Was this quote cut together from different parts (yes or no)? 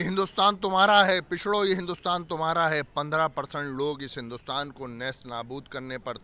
no